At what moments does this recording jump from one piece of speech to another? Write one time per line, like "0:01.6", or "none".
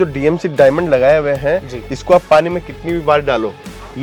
none